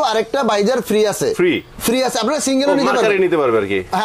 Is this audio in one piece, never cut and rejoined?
yes; 0 cuts

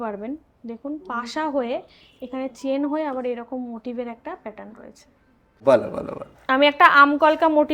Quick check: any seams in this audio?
yes; 1 cut; at 5.6 s

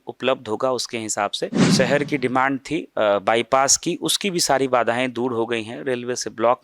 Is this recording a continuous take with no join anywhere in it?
no; 1 cut; at 1.6 s

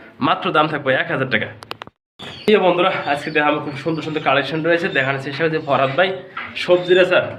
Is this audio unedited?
yes; 0 cuts

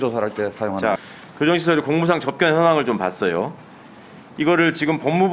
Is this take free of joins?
no; 1 cut; at 1.0 s

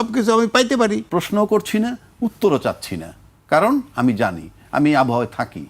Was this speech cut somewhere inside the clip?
yes; 1 cut; at 1.0 s

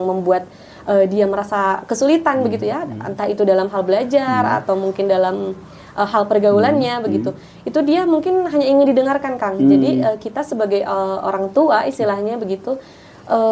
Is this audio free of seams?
yes; 0 cuts

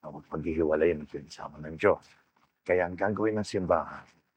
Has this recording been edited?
no; 0 cuts

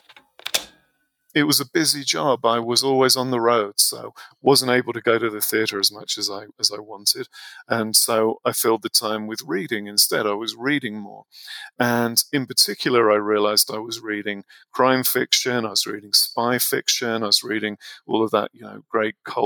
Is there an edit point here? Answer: yes; 1 cut; at 1.2 s

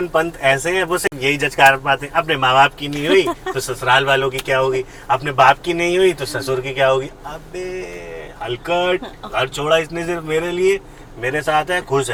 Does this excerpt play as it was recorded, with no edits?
yes; 0 cuts

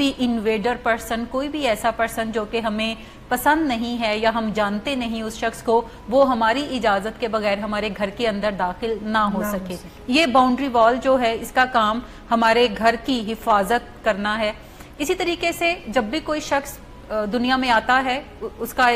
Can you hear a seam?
no; 0 cuts

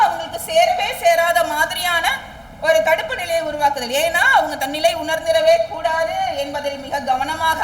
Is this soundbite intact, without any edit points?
yes; 0 cuts

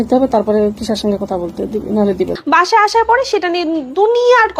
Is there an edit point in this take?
yes; 1 cut; at 2.4 s

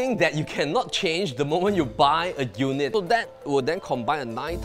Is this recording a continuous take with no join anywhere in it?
no; 1 cut; at 2.9 s

